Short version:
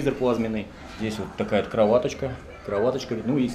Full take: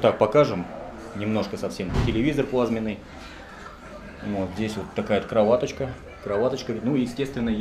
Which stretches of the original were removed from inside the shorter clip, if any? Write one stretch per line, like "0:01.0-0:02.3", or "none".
0:03.3-0:04.5